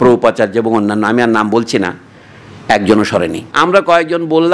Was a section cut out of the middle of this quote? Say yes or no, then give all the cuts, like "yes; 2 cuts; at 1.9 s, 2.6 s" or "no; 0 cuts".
yes; 1 cut; at 3.4 s